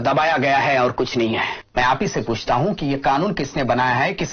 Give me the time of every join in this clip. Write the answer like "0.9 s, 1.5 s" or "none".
1.6 s